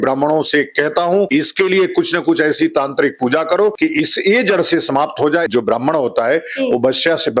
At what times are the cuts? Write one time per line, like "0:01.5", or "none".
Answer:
0:01.3
0:03.8
0:05.5